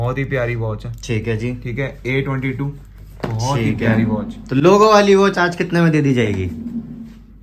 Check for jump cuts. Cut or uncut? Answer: uncut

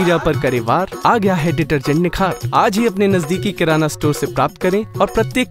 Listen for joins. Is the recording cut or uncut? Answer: uncut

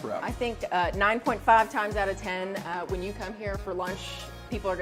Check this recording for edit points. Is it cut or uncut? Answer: uncut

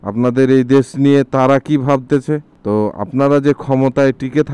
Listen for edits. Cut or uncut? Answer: uncut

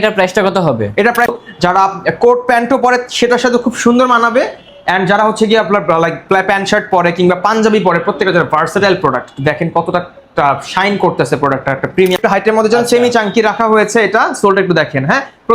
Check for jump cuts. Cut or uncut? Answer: cut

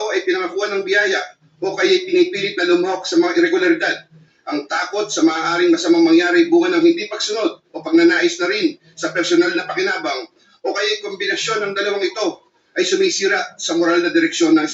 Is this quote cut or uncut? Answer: uncut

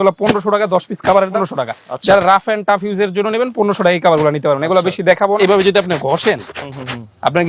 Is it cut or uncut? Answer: cut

